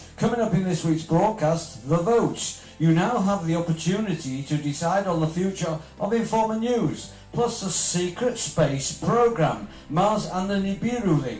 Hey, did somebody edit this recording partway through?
yes; 1 cut; at 1.4 s

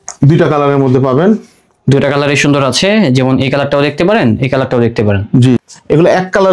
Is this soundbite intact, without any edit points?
no; 1 cut; at 5.6 s

